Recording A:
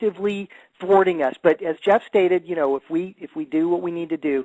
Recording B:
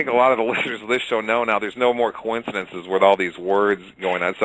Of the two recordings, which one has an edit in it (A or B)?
B